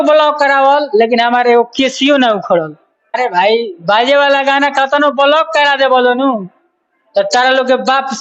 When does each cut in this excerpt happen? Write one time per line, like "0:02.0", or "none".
0:03.2